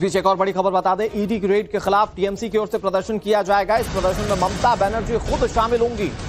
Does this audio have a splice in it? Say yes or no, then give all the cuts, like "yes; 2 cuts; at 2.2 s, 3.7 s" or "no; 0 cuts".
yes; 1 cut; at 1.0 s